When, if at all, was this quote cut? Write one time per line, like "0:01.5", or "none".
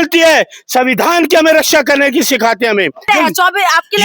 0:03.1